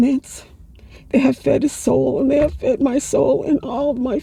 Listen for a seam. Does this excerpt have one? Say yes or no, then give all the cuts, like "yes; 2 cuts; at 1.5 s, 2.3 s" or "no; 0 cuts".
no; 0 cuts